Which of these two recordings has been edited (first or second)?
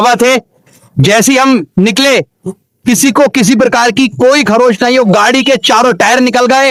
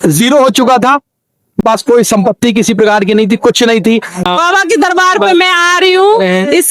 second